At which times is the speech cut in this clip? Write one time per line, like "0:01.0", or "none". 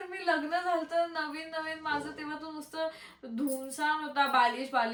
none